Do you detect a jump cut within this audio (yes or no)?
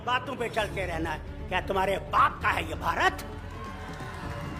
no